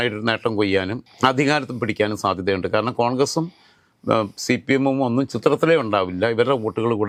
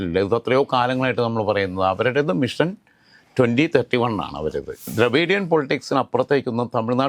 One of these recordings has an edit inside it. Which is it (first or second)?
second